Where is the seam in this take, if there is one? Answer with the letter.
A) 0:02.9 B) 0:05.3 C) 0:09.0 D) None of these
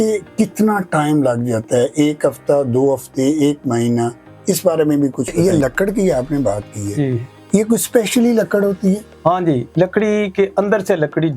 B